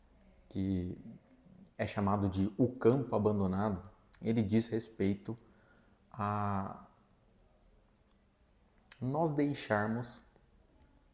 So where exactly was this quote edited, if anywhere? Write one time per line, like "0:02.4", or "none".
none